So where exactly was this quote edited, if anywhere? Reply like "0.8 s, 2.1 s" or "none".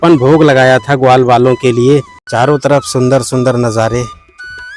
2.2 s